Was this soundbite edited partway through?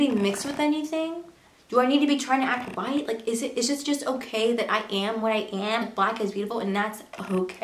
yes; 1 cut; at 5.8 s

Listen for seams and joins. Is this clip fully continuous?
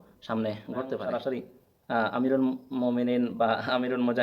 no; 1 cut; at 1.0 s

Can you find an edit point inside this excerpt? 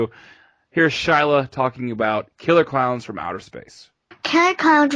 yes; 1 cut; at 1.2 s

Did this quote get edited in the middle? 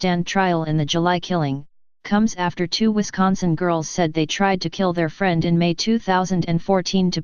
yes; 1 cut; at 6.1 s

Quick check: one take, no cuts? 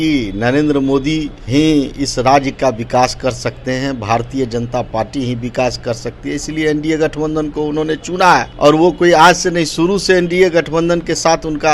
no; 2 cuts; at 1.4 s, 8.5 s

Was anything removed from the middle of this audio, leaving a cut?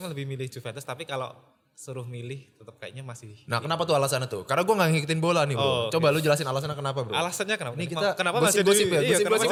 no; 0 cuts

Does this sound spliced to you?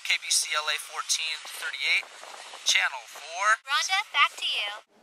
yes; 1 cut; at 3.6 s

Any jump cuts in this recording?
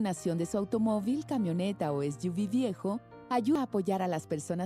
yes; 1 cut; at 3.6 s

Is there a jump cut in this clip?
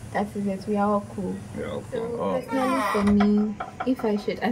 yes; 1 cut; at 2.4 s

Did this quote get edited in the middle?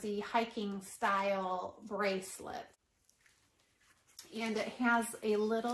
yes; 1 cut; at 2.8 s

